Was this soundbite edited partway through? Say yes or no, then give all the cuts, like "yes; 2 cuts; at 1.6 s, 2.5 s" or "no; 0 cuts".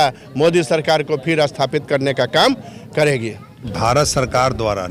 no; 0 cuts